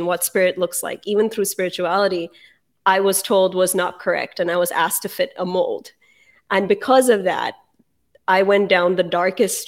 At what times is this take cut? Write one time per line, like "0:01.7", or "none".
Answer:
none